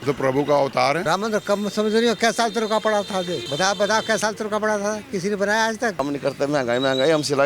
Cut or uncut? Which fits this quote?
cut